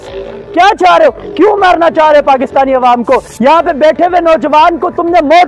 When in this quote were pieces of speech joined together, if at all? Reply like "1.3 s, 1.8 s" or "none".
none